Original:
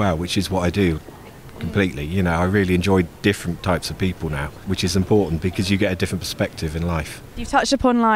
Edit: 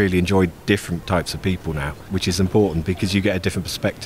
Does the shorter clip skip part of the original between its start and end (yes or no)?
no